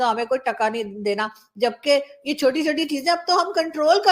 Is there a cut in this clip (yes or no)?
no